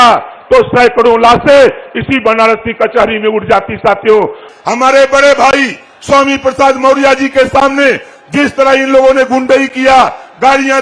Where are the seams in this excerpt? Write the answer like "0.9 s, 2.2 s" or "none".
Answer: 4.4 s